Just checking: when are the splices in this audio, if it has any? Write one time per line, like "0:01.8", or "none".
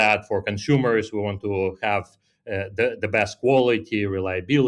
none